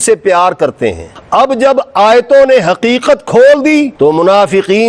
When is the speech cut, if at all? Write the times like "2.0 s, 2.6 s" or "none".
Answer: 1.1 s

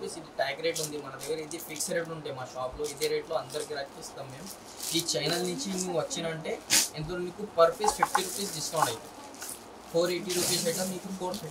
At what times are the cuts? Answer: none

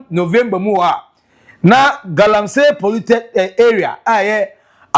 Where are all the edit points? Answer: none

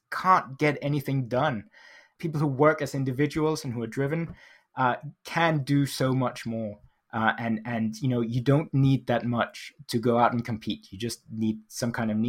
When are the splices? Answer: 2.0 s

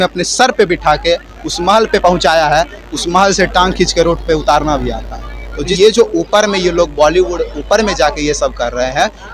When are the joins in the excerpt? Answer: 5.7 s

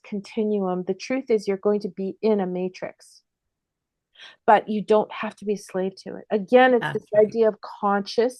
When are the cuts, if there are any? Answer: none

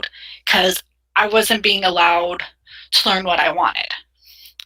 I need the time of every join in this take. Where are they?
none

